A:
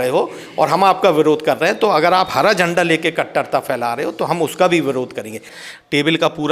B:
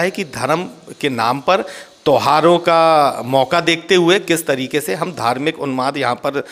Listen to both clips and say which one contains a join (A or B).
A